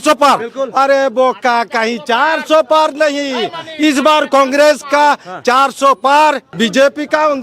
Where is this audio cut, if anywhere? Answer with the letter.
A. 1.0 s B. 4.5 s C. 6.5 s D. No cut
C